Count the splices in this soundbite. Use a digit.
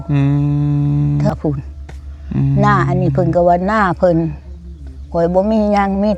1